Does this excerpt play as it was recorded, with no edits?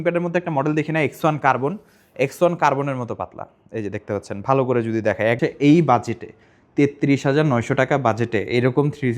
no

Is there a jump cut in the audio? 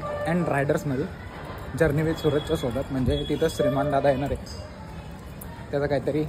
no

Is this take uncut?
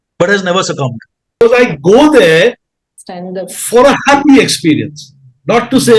no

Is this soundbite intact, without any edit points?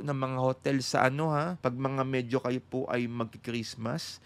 no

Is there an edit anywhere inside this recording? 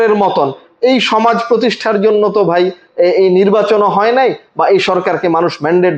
no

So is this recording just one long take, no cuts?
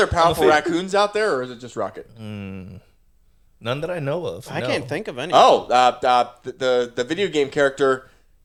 yes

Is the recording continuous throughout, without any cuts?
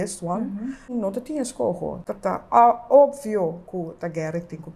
no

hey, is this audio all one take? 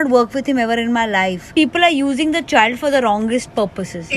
no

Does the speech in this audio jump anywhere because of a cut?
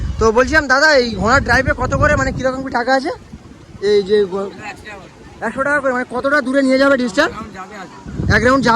no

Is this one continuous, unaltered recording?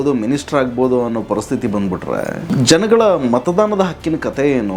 no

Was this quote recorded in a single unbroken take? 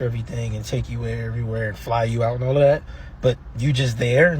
no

